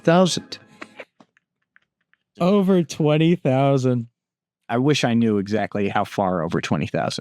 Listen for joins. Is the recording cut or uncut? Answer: cut